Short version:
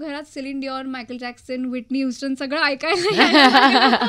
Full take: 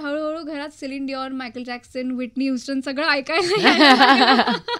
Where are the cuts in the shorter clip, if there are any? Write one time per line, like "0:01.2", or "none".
none